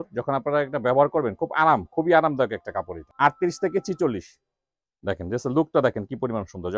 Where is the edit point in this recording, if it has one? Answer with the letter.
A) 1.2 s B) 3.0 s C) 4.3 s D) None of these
B